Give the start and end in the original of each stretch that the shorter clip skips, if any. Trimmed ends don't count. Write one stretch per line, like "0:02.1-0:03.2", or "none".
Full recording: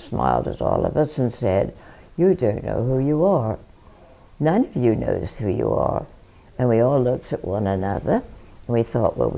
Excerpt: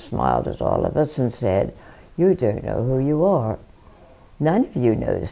none